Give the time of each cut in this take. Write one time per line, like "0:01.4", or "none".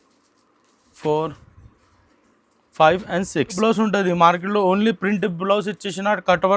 0:03.6

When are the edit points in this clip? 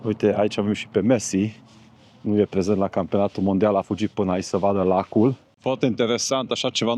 0:05.5

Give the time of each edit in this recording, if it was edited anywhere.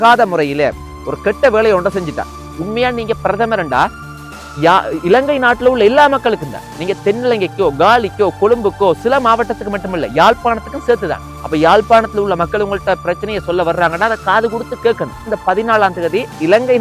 0:02.3
0:15.3

